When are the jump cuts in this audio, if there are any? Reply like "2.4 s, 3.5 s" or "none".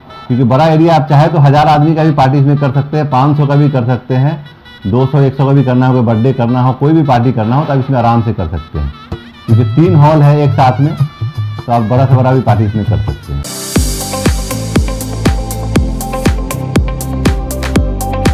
13.4 s